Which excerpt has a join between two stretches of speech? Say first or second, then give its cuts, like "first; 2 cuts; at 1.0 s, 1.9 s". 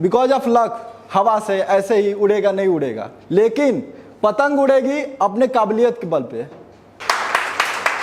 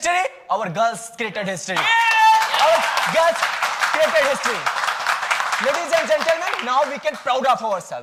first; 1 cut; at 7.0 s